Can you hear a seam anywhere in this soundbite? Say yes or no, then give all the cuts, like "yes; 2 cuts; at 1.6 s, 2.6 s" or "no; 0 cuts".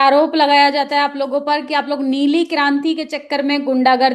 no; 0 cuts